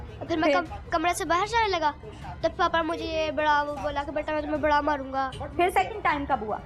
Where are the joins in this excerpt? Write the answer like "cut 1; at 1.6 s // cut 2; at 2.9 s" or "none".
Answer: cut 1; at 5.4 s